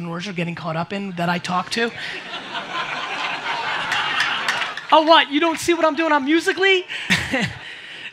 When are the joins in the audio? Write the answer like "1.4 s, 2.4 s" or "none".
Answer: 7.1 s